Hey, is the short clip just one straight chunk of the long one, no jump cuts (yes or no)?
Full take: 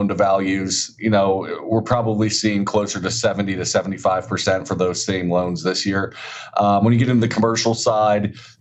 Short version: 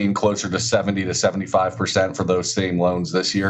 yes